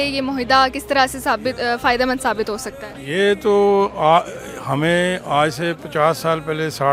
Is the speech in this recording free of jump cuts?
yes; 0 cuts

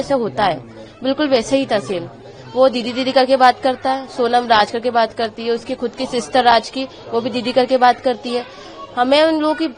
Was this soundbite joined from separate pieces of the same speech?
no; 0 cuts

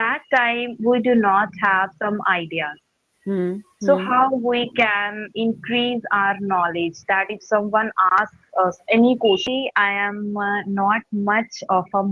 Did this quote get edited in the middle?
yes; 1 cut; at 9.5 s

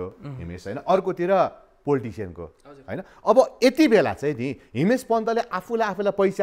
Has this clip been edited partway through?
no; 0 cuts

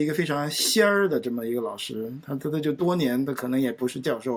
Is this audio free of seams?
yes; 0 cuts

